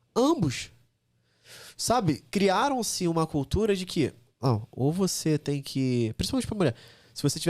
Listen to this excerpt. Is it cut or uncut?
cut